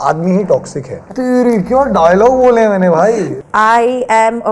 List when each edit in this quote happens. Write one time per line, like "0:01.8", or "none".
0:01.1
0:03.4